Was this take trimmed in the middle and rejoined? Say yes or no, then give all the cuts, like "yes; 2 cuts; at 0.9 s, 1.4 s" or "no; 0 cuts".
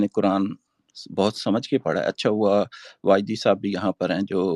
no; 0 cuts